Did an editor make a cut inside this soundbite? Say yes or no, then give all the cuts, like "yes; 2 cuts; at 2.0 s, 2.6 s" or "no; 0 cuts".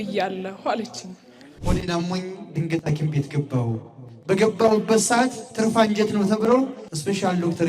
yes; 1 cut; at 1.5 s